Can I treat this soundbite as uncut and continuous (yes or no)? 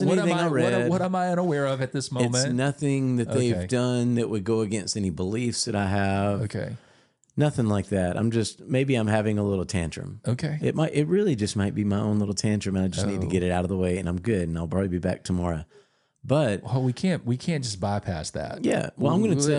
yes